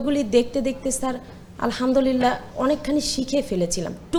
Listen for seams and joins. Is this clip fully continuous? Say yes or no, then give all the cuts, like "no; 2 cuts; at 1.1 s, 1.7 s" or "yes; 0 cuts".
yes; 0 cuts